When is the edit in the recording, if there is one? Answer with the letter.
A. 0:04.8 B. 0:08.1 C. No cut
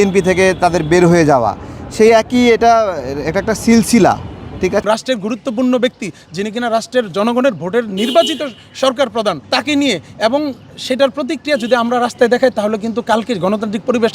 A